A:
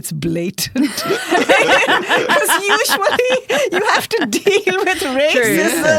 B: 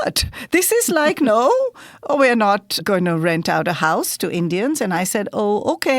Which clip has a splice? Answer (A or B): B